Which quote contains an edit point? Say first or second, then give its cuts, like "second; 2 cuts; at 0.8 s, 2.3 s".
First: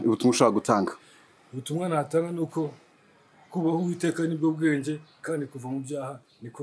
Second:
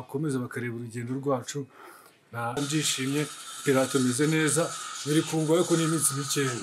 second; 1 cut; at 2.6 s